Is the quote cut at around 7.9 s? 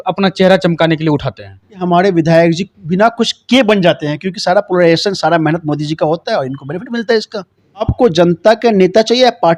yes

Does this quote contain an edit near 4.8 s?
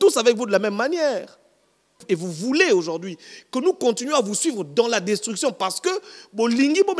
no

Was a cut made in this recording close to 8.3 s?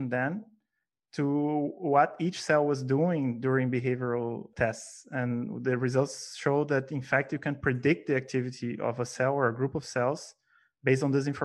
no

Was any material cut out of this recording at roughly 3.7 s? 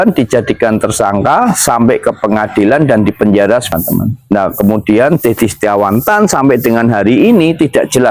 yes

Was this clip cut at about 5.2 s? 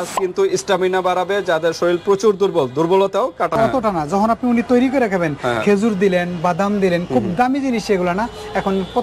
no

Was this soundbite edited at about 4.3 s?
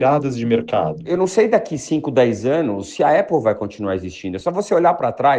no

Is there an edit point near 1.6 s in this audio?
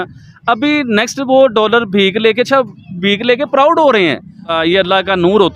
no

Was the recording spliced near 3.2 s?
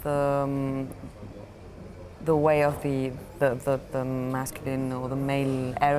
no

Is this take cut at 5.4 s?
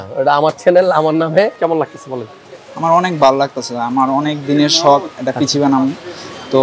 no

